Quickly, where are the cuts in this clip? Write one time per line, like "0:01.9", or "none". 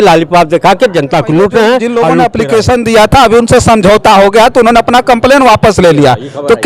0:01.9